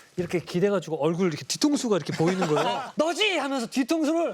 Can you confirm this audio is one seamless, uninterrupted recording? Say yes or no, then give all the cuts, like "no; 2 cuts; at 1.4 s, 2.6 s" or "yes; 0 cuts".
no; 1 cut; at 2.8 s